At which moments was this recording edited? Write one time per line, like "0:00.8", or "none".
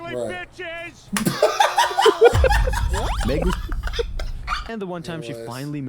0:04.6